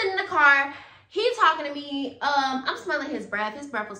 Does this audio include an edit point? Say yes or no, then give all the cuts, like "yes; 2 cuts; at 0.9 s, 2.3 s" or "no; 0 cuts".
no; 0 cuts